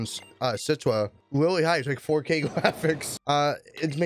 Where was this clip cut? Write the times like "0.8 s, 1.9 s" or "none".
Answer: 1.2 s, 3.1 s